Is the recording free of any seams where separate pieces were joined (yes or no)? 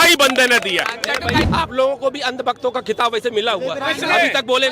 no